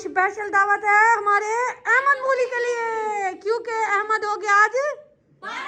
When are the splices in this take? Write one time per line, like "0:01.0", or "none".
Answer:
none